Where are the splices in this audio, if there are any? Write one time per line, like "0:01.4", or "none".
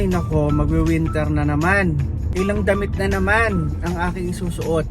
0:02.2